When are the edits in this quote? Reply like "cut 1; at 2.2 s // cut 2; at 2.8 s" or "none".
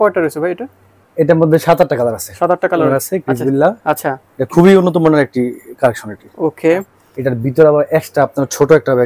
cut 1; at 3.0 s // cut 2; at 7.0 s